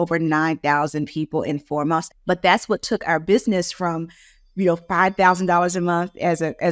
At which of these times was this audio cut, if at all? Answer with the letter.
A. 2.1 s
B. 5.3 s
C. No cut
A